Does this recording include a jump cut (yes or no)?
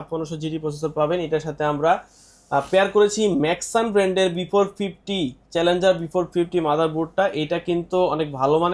no